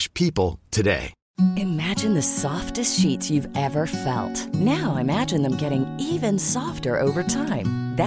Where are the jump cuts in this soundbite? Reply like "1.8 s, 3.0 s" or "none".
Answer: 1.2 s

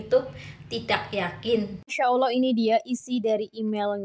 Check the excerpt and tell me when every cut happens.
2.0 s

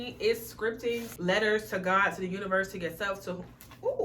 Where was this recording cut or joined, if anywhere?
1.1 s

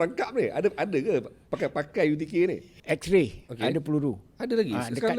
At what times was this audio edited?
2.7 s

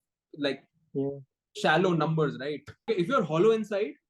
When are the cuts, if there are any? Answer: 2.9 s

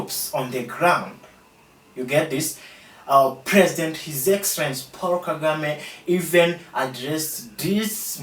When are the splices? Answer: none

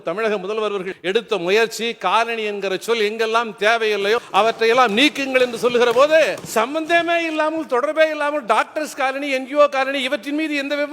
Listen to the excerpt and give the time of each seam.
0.9 s, 4.3 s, 6.4 s

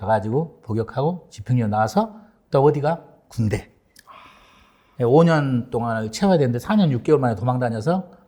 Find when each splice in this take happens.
none

